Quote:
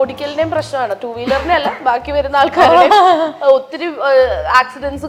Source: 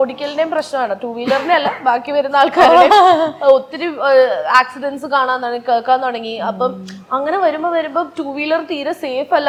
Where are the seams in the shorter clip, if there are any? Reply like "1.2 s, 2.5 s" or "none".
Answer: none